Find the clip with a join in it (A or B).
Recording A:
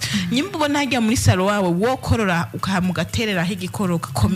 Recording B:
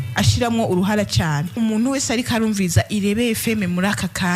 B